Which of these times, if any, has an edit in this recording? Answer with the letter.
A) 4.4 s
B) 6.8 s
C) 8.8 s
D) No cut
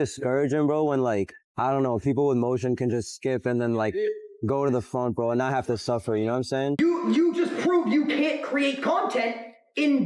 B